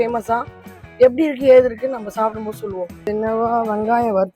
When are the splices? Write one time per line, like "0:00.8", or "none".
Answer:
0:03.1